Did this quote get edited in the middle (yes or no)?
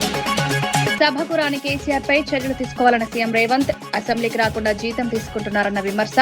yes